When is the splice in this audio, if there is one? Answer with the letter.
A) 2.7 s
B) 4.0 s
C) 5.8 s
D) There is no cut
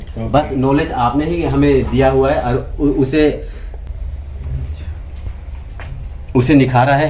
D